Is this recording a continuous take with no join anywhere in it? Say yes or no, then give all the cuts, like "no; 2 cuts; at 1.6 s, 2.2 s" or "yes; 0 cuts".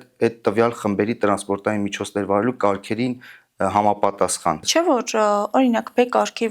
no; 1 cut; at 4.6 s